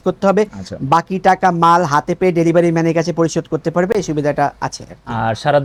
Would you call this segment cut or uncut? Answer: uncut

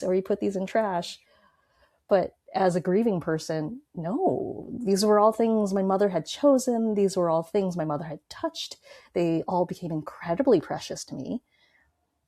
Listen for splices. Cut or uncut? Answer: uncut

